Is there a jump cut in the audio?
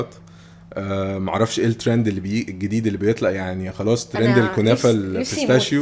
no; 0 cuts

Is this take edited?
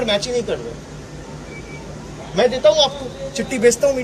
no; 0 cuts

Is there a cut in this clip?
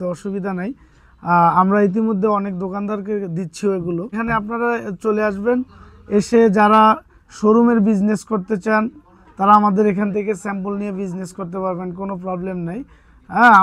yes; 1 cut; at 4.2 s

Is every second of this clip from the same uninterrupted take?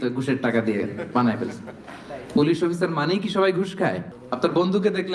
no; 1 cut; at 4.1 s

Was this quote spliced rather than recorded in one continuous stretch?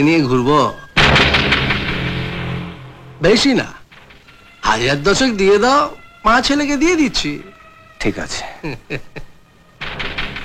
no; 0 cuts

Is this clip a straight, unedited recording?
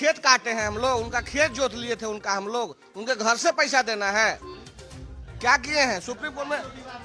yes; 0 cuts

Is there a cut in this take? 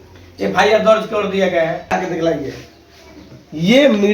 yes; 1 cut; at 1.9 s

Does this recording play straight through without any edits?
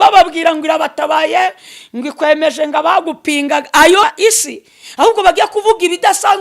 no; 1 cut; at 4.0 s

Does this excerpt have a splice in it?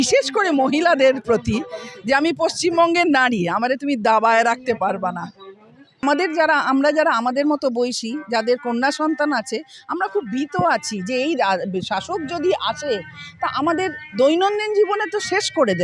yes; 1 cut; at 6.0 s

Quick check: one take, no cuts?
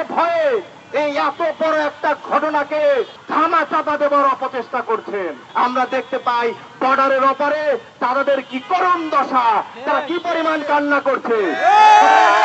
no; 2 cuts; at 3.2 s, 5.5 s

